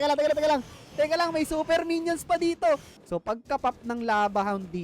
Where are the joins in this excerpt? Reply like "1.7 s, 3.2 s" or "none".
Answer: 3.0 s